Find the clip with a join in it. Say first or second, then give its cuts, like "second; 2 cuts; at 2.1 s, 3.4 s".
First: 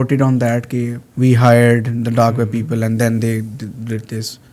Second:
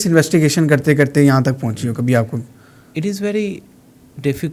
first; 1 cut; at 1.0 s